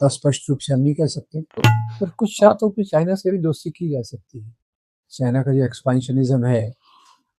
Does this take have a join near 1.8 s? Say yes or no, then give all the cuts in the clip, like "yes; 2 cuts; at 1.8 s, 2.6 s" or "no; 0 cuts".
yes; 1 cut; at 1.8 s